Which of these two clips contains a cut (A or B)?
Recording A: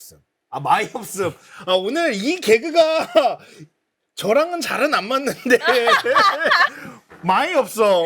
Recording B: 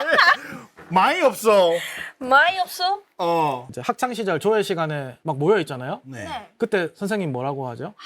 B